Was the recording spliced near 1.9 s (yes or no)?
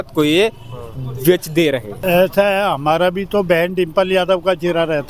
yes